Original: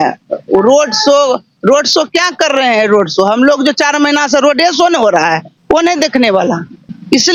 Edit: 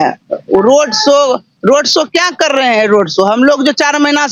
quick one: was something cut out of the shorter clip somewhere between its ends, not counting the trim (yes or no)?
no